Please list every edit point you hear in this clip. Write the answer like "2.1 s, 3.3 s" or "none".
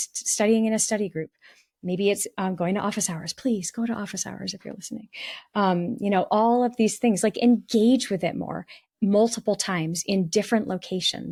none